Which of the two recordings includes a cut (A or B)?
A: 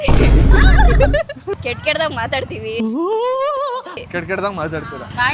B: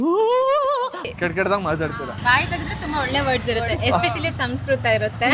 A